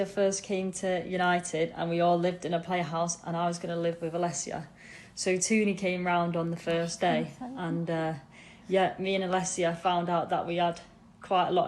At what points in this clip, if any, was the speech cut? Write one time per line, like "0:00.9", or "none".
none